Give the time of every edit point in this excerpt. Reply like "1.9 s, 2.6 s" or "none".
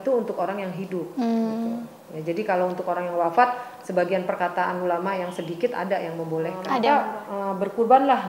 6.9 s

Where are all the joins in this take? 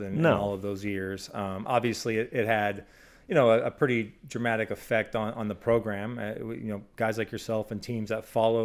none

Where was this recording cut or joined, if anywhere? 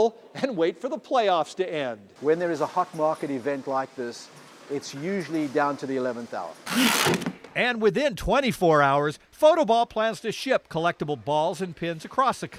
none

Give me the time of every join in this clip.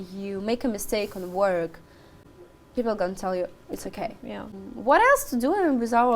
2.2 s, 4.6 s

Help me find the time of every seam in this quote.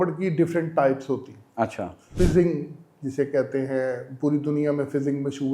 2.1 s

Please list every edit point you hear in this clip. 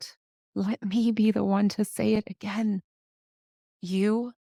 none

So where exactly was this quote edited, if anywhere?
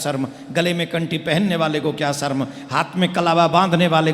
none

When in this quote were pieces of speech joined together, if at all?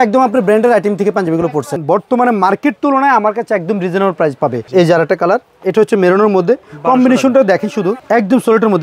1.8 s, 4.6 s, 8.0 s

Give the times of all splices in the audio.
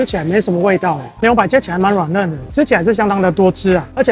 1.2 s

